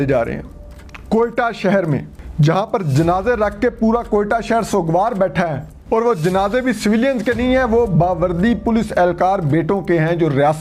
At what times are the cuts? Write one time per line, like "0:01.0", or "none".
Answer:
0:02.2
0:05.7